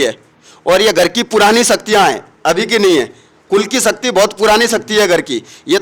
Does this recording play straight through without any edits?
yes; 0 cuts

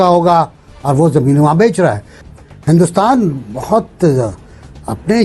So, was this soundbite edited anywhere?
yes; 1 cut; at 2.1 s

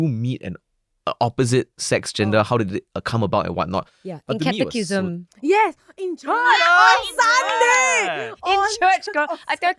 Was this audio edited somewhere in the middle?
no; 0 cuts

